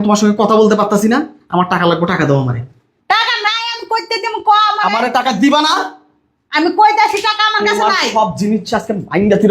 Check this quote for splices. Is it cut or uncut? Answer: cut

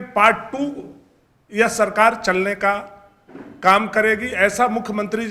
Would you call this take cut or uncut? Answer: uncut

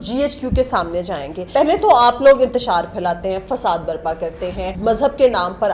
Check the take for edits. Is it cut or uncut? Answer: cut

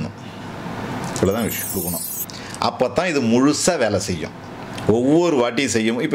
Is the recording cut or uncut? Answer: cut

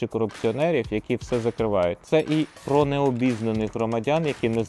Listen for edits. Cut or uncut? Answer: cut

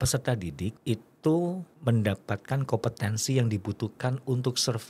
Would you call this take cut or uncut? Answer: cut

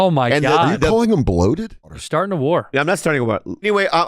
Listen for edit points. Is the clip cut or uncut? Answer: cut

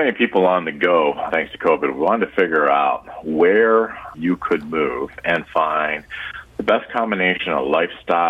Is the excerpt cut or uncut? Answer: cut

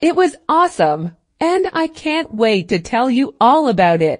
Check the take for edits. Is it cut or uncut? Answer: uncut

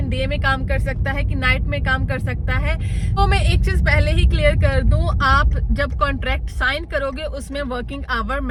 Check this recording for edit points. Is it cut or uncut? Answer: uncut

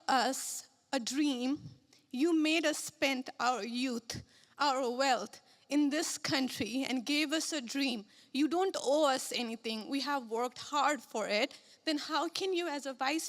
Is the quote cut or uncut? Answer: uncut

